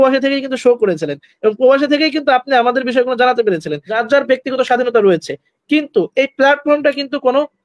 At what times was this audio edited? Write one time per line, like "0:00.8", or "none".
0:03.9